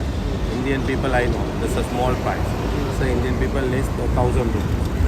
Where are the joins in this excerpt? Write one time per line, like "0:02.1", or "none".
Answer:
none